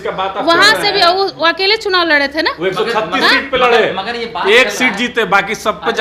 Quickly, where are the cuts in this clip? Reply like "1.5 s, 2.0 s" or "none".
none